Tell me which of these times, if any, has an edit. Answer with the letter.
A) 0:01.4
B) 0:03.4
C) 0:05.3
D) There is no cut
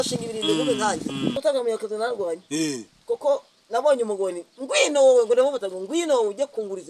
A